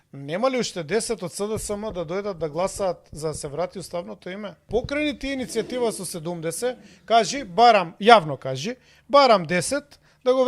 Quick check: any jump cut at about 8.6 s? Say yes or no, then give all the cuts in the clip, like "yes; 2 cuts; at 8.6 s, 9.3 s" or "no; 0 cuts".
no; 1 cut; at 4.7 s